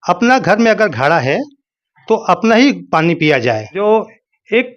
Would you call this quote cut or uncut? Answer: cut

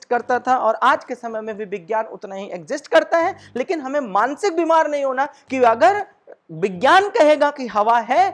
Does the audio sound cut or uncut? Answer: uncut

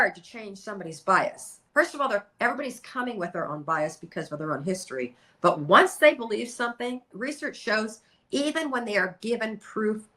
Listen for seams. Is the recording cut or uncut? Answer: cut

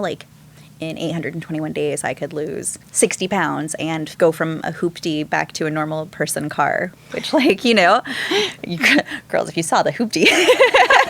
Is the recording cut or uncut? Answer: cut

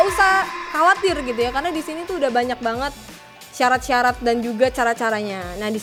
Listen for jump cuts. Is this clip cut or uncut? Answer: uncut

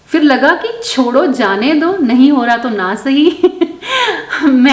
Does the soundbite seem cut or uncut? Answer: uncut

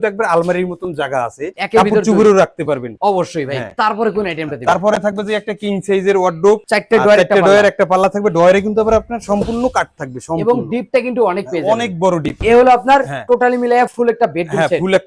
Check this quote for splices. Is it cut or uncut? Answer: uncut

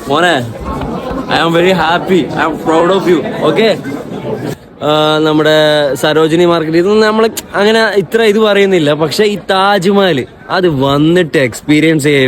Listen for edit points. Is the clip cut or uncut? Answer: cut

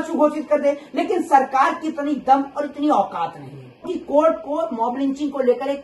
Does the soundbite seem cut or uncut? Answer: cut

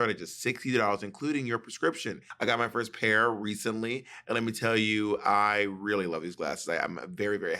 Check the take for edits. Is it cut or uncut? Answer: cut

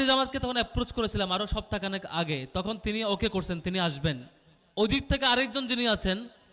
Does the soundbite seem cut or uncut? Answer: uncut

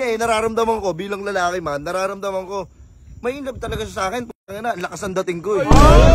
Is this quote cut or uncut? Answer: uncut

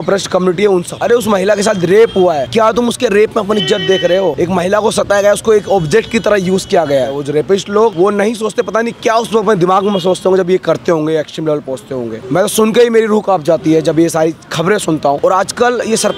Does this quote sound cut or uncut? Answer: cut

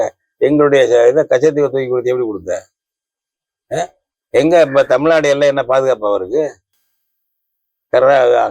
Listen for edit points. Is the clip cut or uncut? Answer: uncut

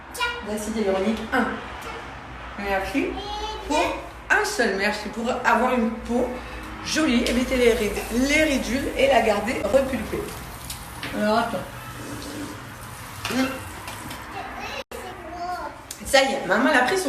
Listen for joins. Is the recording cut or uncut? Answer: cut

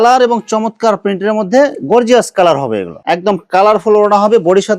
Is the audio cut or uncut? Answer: cut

